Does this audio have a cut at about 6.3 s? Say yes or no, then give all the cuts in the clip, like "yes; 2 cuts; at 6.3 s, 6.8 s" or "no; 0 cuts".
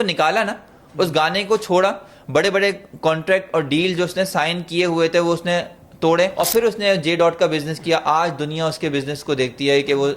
yes; 1 cut; at 6.3 s